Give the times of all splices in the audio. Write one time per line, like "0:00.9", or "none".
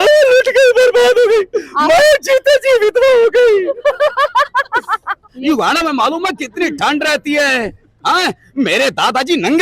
0:05.3